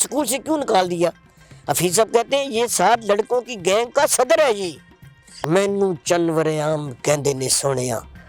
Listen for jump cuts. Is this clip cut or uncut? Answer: cut